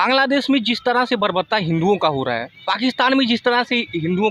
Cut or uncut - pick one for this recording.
uncut